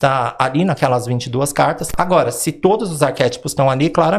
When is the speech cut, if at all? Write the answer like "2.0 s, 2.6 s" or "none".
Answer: 1.9 s